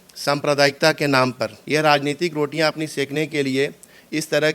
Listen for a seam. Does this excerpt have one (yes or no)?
yes